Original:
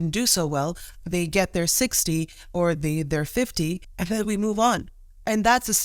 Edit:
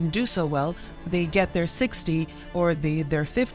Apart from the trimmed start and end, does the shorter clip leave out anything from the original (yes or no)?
no